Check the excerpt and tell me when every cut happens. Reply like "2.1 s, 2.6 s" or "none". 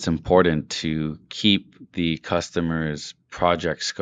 none